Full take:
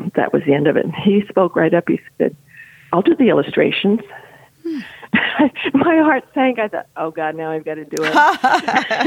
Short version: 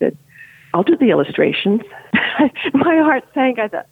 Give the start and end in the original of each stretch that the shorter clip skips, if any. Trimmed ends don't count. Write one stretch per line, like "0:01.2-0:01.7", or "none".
0:04.1-0:05.0